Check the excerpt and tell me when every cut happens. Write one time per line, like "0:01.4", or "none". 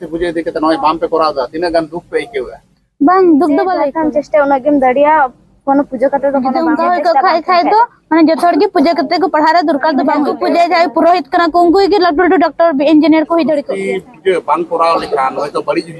0:03.9
0:06.6
0:10.3
0:13.7